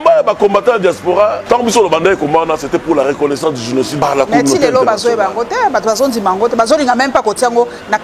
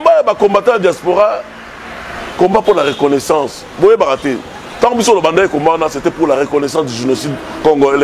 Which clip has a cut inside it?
first; 2 cuts; at 1.4 s, 3.9 s

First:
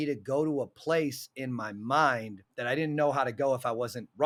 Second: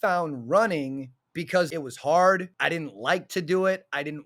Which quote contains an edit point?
second; 2 cuts; at 1.7 s, 2.5 s

